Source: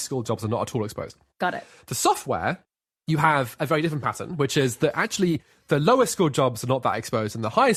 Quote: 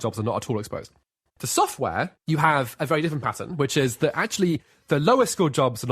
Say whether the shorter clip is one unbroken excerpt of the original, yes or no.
no